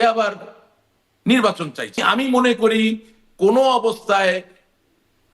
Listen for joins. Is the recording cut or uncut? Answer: cut